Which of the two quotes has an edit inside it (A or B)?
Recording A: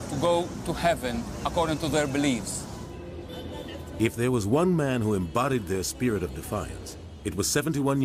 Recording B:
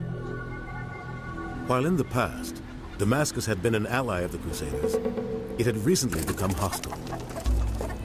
B